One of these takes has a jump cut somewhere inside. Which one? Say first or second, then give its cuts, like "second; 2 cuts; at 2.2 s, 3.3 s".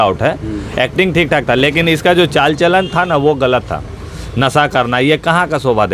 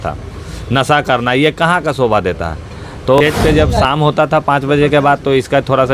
second; 1 cut; at 3.2 s